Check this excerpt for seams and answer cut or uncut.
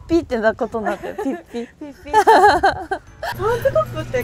cut